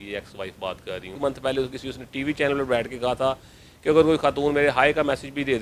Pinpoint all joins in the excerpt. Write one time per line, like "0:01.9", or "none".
0:01.2